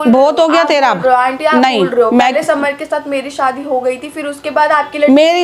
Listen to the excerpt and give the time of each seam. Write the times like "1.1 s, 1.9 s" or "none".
none